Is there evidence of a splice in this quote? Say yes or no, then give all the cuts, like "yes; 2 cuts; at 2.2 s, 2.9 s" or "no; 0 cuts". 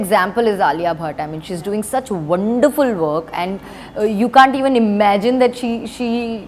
no; 0 cuts